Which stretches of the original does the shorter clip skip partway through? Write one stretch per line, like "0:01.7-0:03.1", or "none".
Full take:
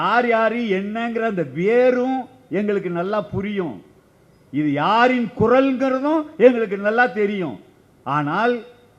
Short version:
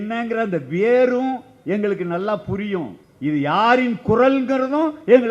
0:03.9-0:04.3